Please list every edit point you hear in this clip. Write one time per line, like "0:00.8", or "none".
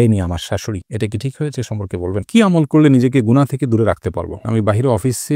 0:02.2
0:04.5